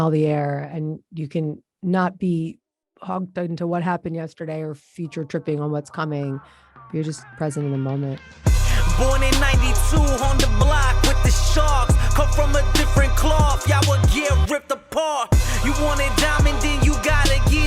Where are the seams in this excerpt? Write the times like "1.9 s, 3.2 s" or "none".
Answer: 8.3 s